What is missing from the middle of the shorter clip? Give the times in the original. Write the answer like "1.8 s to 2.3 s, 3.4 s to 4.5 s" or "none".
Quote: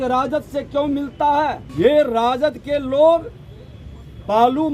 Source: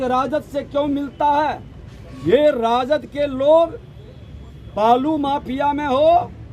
1.6 s to 2.1 s